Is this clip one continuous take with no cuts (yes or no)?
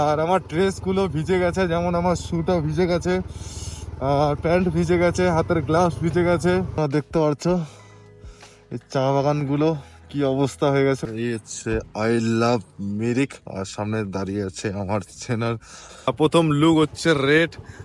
no